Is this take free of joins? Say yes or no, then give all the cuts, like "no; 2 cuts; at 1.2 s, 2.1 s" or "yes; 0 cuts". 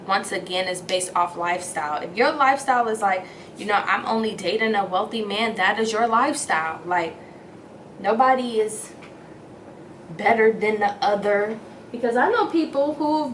yes; 0 cuts